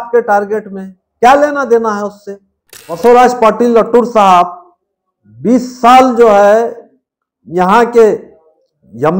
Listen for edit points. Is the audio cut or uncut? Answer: cut